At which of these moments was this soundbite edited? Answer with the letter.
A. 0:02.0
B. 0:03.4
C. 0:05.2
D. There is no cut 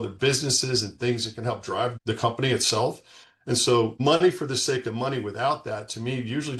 A